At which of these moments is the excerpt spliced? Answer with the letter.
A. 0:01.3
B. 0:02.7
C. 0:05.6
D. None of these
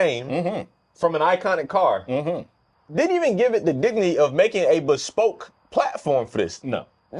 B